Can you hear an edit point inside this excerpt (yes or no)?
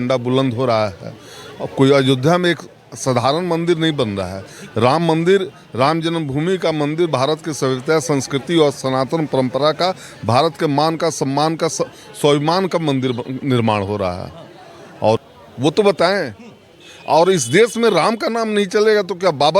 yes